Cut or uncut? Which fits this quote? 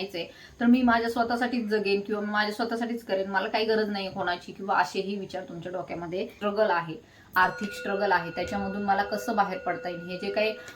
cut